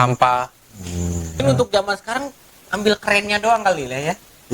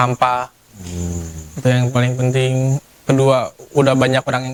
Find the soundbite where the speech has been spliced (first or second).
first